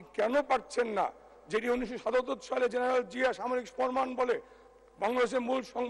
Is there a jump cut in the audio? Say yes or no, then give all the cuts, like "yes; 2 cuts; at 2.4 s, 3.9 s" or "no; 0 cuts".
no; 0 cuts